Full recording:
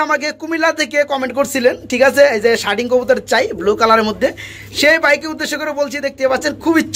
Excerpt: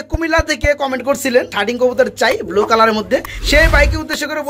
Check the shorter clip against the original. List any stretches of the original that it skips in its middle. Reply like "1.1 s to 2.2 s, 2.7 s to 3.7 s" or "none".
1.8 s to 2.6 s, 4.5 s to 4.7 s